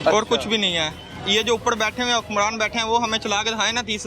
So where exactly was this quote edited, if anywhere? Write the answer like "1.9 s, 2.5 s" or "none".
1.1 s